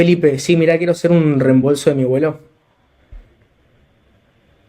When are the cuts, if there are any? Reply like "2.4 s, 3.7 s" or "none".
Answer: none